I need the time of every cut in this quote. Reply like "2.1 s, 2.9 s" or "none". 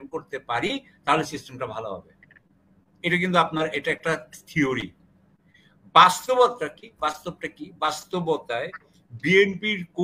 none